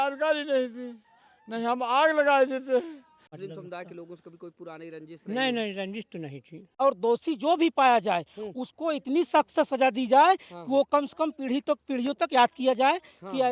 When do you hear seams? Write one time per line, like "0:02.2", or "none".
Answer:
0:03.3
0:06.8